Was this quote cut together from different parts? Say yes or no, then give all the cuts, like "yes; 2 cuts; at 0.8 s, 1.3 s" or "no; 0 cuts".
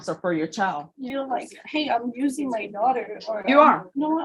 yes; 1 cut; at 1.1 s